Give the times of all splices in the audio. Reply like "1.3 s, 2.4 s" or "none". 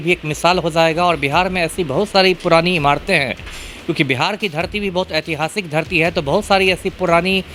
none